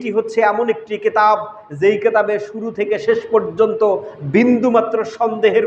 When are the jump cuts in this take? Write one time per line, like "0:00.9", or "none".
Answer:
none